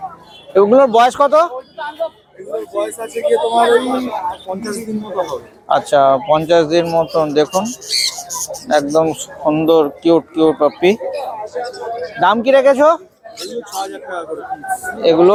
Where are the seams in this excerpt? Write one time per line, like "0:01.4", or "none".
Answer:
none